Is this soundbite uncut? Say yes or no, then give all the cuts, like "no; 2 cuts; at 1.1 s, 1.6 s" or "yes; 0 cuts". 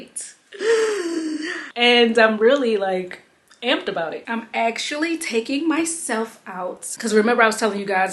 yes; 0 cuts